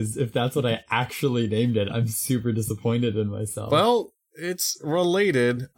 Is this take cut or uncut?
cut